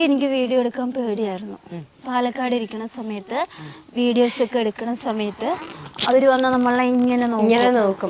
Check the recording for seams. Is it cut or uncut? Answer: uncut